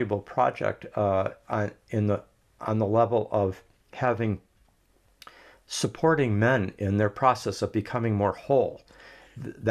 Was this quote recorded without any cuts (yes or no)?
yes